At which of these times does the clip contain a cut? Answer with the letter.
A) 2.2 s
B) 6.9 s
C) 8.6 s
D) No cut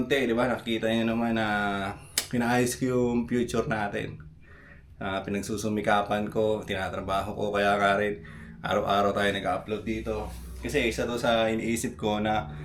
D